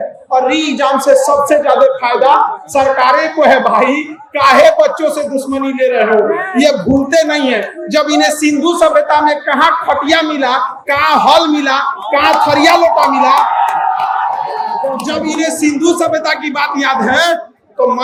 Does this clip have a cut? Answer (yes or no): no